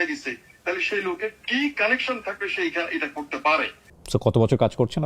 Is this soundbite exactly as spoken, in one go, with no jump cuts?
no; 1 cut; at 3.8 s

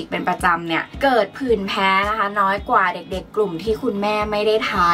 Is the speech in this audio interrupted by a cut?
no; 0 cuts

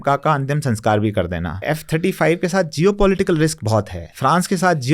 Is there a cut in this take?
yes; 2 cuts; at 1.5 s, 4.0 s

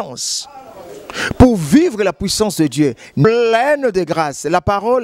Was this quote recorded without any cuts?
no; 1 cut; at 3.2 s

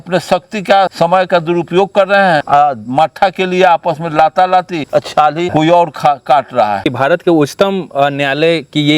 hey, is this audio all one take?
no; 4 cuts; at 0.9 s, 2.4 s, 5.3 s, 6.9 s

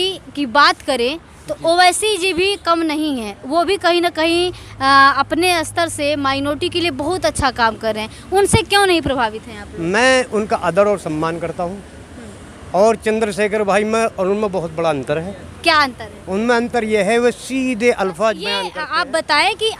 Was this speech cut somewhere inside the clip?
yes; 1 cut; at 18.8 s

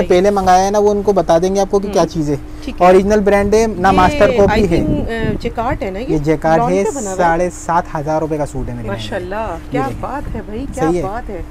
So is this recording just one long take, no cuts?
yes; 0 cuts

